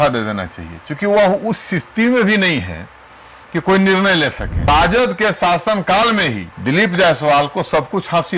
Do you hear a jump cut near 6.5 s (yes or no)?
yes